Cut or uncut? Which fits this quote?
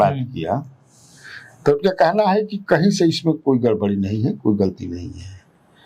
uncut